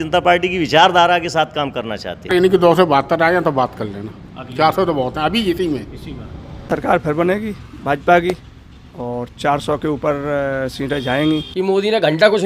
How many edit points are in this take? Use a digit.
3